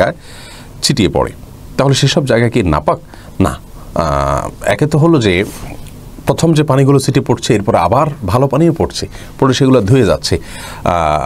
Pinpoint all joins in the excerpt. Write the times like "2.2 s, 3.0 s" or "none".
none

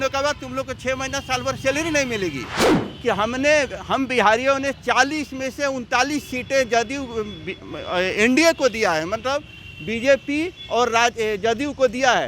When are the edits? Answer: 2.8 s

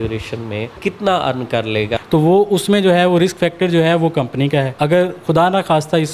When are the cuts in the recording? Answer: 0.8 s, 2.0 s, 4.7 s

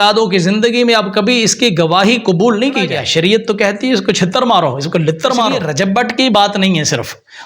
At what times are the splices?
3.0 s, 5.6 s

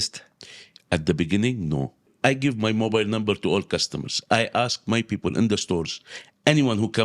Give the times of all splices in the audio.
2.1 s

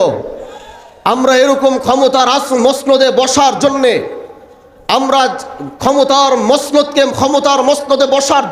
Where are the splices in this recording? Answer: none

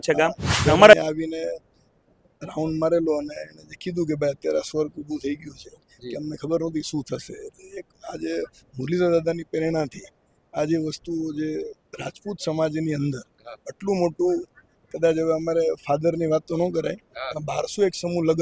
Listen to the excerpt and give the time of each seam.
0.9 s

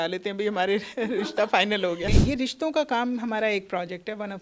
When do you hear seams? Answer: 2.2 s

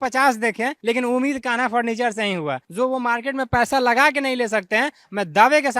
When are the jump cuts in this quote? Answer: 2.6 s

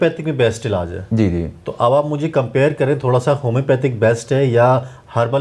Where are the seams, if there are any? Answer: none

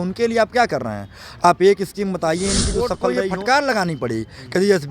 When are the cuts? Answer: 2.9 s

